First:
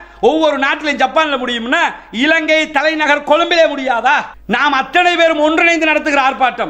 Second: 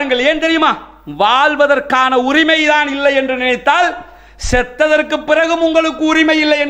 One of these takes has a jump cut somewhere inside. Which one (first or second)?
first